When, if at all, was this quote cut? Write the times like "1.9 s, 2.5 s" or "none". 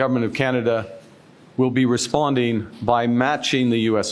none

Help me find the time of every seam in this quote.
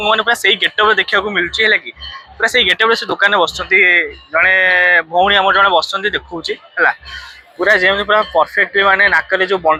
none

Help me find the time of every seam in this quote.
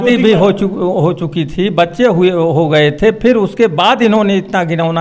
none

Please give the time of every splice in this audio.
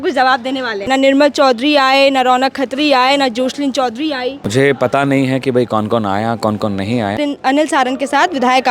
0.9 s, 4.5 s, 7.2 s

